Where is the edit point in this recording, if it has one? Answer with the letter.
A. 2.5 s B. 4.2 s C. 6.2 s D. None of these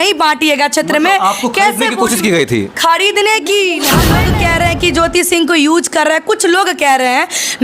B